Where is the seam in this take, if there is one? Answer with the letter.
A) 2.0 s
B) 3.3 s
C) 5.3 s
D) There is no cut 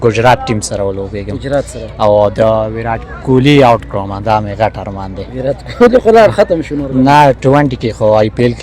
D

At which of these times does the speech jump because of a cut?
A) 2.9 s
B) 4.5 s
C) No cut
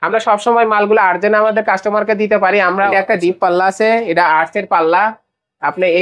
A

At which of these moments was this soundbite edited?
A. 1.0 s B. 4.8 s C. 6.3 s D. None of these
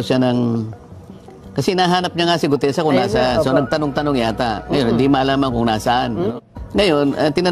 C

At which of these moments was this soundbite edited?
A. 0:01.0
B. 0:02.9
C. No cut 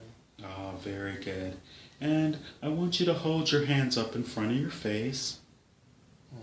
A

